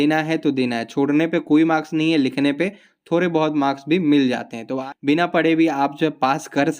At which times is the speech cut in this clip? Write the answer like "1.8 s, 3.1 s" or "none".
4.8 s